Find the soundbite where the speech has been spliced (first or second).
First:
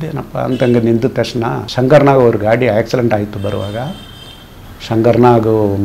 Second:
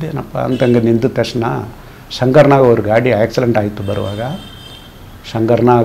first